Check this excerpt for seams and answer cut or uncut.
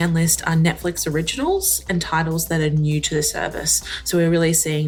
uncut